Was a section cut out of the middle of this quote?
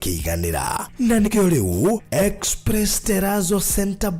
yes; 1 cut; at 1.3 s

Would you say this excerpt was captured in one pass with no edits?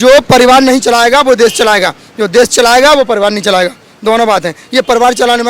yes; 0 cuts

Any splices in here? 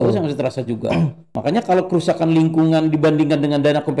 yes; 1 cut; at 1.3 s

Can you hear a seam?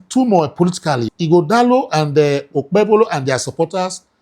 yes; 1 cut; at 1.1 s

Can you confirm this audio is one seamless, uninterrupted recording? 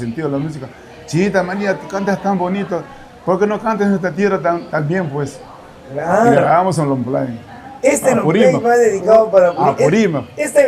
yes; 0 cuts

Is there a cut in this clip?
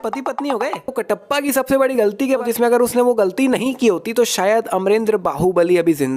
yes; 2 cuts; at 1.0 s, 2.4 s

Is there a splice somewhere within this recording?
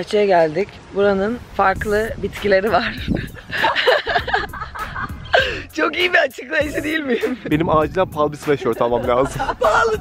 yes; 2 cuts; at 1.4 s, 7.4 s

